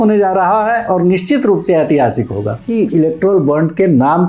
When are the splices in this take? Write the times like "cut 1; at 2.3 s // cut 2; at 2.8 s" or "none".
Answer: cut 1; at 2.7 s